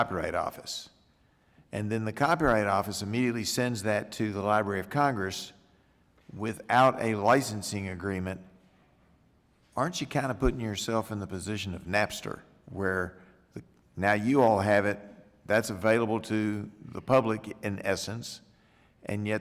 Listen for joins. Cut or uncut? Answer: uncut